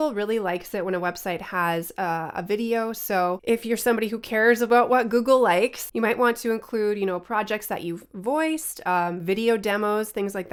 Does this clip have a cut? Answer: no; 0 cuts

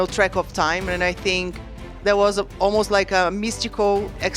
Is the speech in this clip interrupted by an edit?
no; 0 cuts

